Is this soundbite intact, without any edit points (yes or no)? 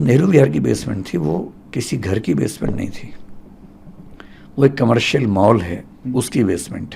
yes